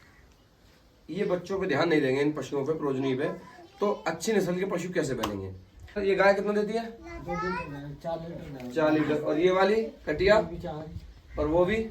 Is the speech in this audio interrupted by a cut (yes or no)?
yes